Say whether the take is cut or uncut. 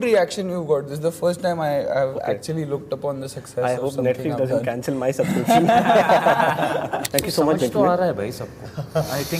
cut